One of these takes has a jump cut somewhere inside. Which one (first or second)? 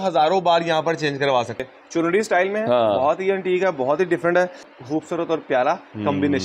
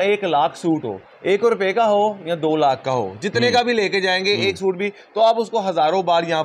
first